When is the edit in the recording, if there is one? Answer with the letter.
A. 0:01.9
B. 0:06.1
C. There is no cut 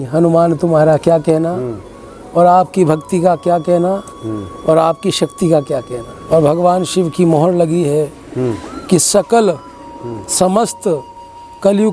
B